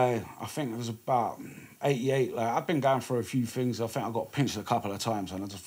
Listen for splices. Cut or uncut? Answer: uncut